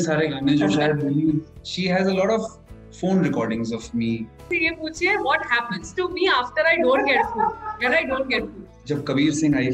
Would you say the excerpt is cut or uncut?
cut